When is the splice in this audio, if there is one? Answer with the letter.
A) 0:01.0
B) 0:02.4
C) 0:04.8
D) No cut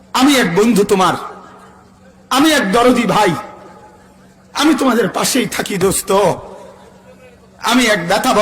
D